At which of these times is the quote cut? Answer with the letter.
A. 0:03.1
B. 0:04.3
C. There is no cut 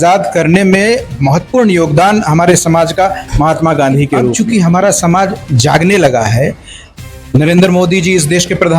B